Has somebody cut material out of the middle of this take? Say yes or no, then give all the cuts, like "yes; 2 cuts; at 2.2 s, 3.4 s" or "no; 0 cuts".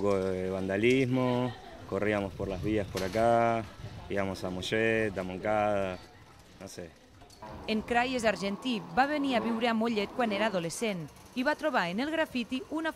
no; 0 cuts